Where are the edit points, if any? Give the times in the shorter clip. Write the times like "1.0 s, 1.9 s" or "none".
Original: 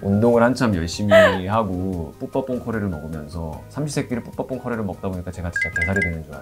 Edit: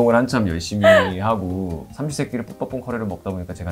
1.9 s